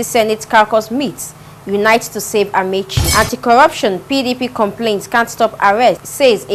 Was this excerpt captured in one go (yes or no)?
yes